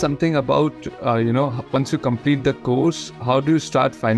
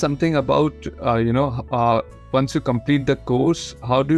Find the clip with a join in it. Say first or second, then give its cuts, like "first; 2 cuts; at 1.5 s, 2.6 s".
first; 1 cut; at 1.6 s